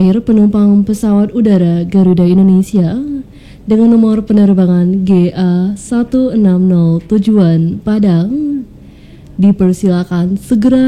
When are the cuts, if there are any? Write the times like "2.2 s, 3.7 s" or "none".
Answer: none